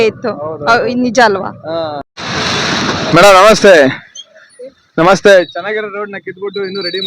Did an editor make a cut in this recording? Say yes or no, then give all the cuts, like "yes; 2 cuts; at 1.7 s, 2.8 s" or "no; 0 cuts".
yes; 1 cut; at 2.1 s